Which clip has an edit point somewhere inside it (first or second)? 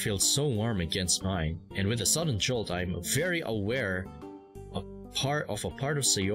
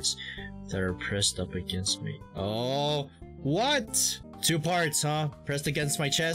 second